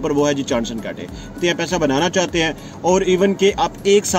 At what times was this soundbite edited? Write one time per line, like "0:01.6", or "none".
0:01.4